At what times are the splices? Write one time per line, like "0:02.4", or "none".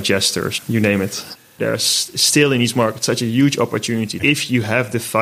0:01.5
0:04.1